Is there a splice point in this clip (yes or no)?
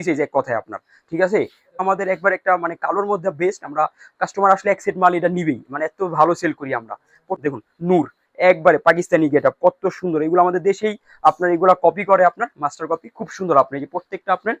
yes